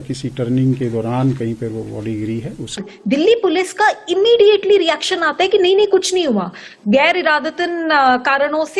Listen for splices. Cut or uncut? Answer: cut